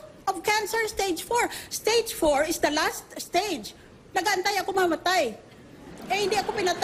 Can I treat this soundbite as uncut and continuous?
no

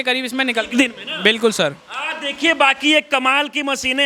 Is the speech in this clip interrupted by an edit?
no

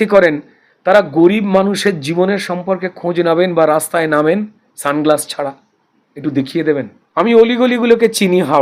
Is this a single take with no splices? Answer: no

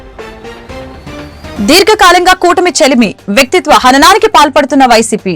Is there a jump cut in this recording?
yes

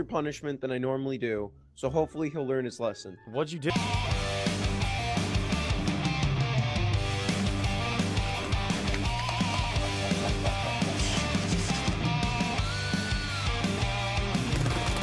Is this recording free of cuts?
yes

